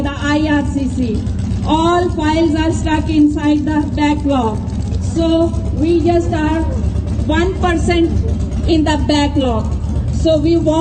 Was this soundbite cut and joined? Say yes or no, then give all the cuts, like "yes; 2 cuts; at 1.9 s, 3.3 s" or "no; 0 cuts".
no; 0 cuts